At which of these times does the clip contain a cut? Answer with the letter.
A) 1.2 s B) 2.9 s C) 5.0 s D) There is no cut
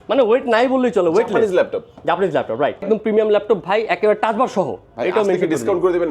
B